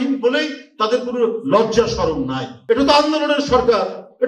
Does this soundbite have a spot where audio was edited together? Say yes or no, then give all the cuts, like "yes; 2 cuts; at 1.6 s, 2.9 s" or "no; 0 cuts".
yes; 1 cut; at 2.5 s